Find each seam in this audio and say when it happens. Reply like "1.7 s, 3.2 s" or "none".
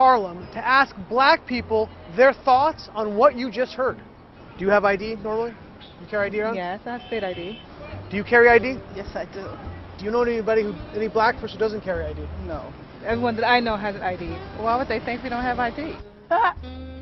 none